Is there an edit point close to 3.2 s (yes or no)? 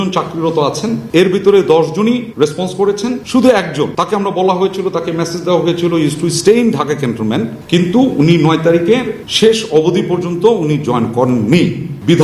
yes